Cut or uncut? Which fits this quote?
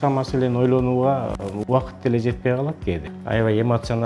cut